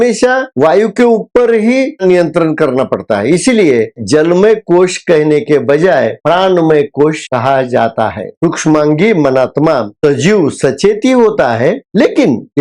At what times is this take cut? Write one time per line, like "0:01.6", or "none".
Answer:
0:02.0
0:04.0